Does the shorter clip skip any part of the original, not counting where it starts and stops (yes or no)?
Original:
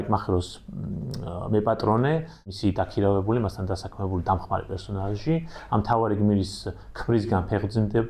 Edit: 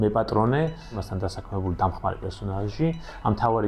yes